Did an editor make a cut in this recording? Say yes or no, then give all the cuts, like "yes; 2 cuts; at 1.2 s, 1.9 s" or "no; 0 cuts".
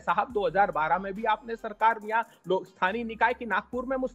no; 0 cuts